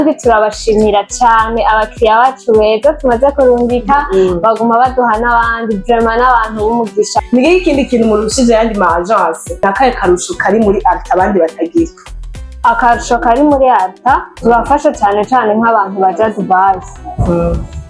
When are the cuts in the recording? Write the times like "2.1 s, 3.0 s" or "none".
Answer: 7.2 s, 9.6 s